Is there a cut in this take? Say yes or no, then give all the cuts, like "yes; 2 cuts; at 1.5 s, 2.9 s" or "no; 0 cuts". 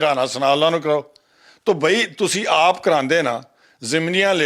no; 0 cuts